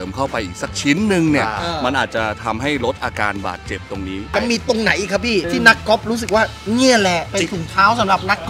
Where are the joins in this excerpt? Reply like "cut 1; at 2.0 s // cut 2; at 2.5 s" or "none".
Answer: cut 1; at 4.3 s // cut 2; at 5.6 s // cut 3; at 7.3 s

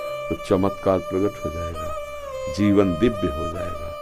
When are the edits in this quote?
none

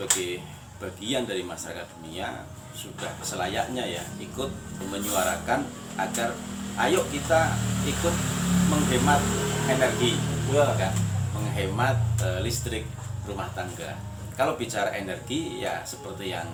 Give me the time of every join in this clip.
none

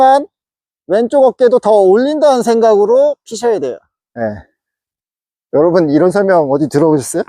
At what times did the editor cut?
cut 1; at 4.0 s

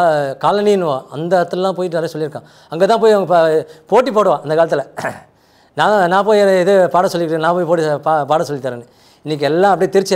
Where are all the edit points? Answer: none

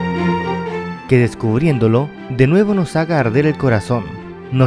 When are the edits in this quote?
cut 1; at 0.9 s

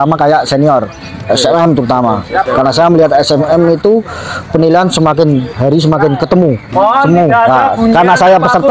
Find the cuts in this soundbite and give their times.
none

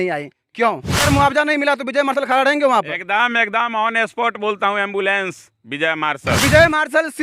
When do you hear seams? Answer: cut 1; at 1.0 s // cut 2; at 6.4 s

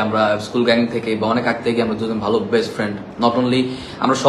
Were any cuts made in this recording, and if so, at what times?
none

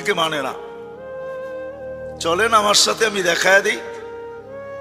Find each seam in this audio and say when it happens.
none

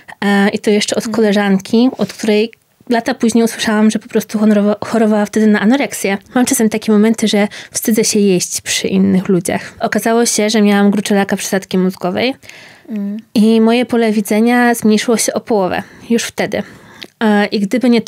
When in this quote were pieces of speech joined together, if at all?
cut 1; at 6.2 s // cut 2; at 9.7 s

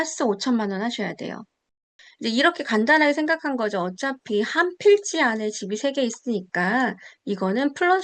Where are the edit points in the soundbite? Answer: cut 1; at 1.7 s

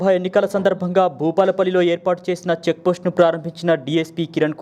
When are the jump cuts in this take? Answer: none

